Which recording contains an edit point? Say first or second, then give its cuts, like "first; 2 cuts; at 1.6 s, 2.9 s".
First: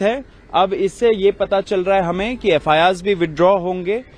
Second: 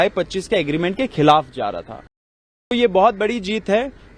second; 1 cut; at 2.7 s